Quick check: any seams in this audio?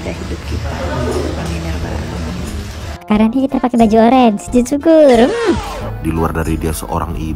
yes; 1 cut; at 5.7 s

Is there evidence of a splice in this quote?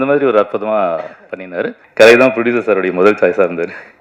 yes; 1 cut; at 1.8 s

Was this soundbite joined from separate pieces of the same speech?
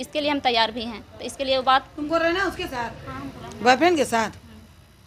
no; 0 cuts

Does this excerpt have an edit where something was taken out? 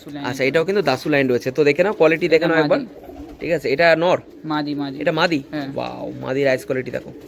no; 0 cuts

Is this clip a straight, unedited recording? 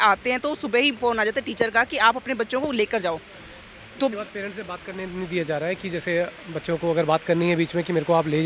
yes; 0 cuts

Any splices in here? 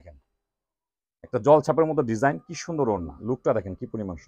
yes; 1 cut; at 3.1 s

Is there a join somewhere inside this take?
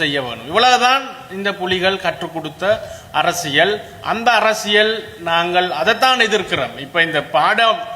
no; 0 cuts

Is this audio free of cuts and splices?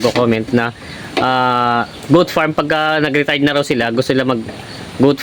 yes; 0 cuts

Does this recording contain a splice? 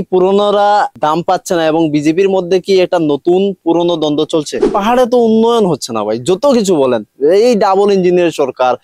yes; 2 cuts; at 0.9 s, 4.6 s

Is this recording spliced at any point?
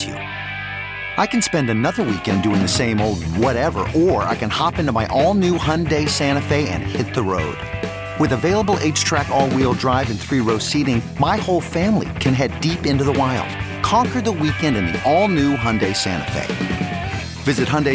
no; 0 cuts

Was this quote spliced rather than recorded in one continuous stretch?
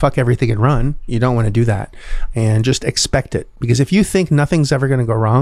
yes; 2 cuts; at 1.0 s, 2.2 s

